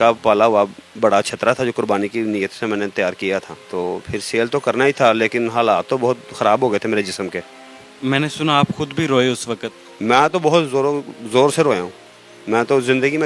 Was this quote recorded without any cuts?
yes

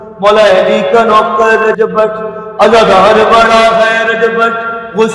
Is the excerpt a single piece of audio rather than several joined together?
yes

